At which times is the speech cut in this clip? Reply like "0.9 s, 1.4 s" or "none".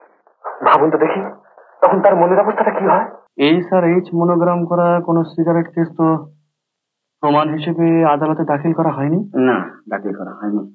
3.2 s